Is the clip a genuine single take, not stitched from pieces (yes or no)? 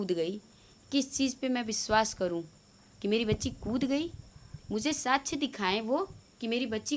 yes